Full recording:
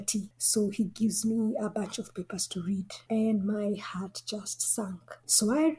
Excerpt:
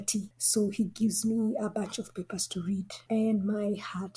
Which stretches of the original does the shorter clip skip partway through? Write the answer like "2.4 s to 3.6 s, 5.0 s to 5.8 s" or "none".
none